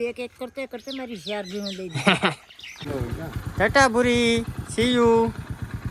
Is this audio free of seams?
no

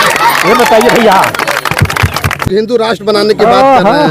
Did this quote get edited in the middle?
yes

